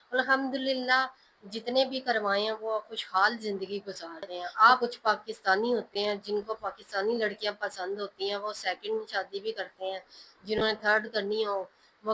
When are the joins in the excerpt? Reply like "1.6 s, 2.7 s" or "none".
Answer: 4.8 s